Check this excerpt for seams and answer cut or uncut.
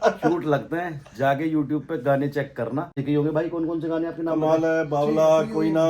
cut